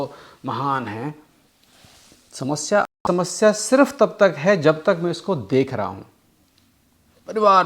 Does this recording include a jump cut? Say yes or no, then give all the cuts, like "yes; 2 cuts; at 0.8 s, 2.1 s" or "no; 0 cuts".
yes; 1 cut; at 2.9 s